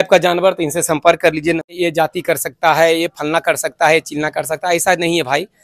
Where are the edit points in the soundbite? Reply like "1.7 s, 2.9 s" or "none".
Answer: 1.7 s